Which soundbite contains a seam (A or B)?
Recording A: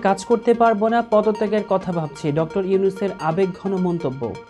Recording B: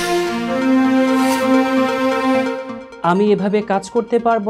B